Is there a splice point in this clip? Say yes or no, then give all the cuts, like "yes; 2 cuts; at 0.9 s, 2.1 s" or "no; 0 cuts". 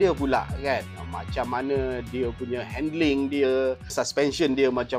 yes; 1 cut; at 3.9 s